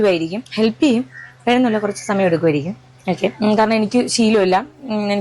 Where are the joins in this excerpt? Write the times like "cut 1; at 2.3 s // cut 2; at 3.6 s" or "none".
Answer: cut 1; at 2.3 s